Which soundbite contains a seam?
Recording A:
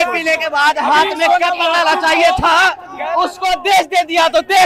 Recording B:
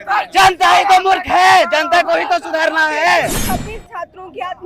B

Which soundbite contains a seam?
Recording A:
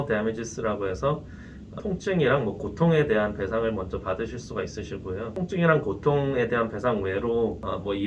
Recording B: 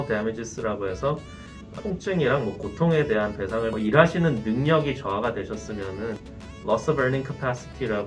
B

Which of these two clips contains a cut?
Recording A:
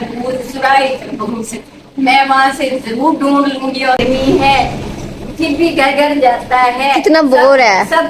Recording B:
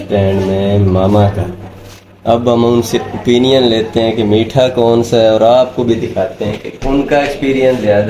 A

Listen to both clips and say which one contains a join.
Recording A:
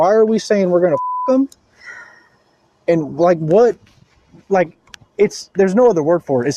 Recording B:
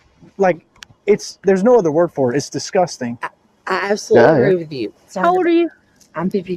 B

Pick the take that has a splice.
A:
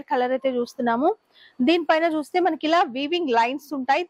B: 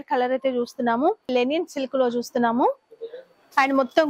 B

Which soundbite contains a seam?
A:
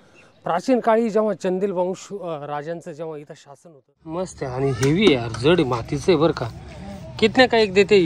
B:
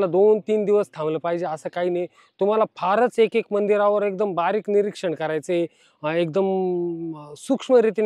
A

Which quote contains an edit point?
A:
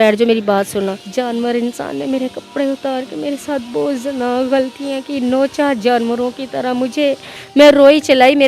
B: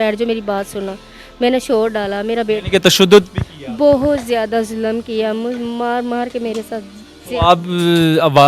A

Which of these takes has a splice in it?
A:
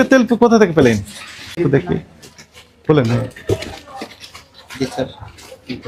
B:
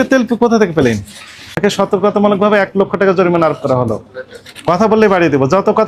B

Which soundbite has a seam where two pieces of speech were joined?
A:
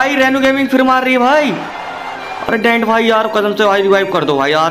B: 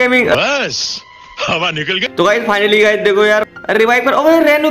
B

